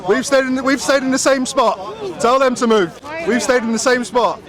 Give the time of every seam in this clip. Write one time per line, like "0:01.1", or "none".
none